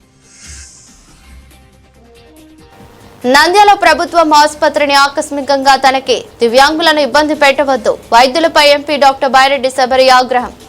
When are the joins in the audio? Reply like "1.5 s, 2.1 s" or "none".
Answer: none